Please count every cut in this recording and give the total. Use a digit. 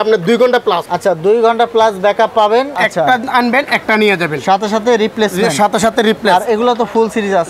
1